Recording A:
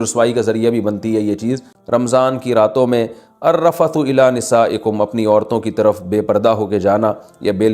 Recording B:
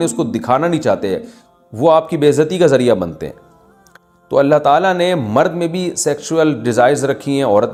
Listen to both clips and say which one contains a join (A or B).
A